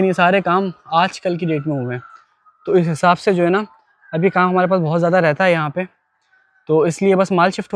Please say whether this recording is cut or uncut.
uncut